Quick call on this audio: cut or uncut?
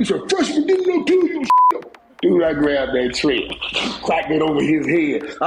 cut